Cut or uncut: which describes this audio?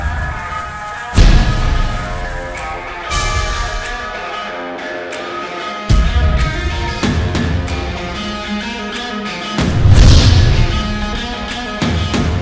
uncut